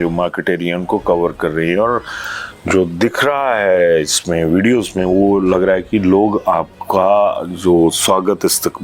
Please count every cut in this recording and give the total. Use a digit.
0